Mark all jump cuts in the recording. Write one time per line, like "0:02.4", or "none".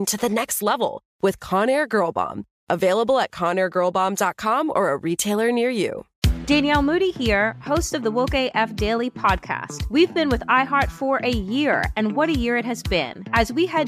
0:06.1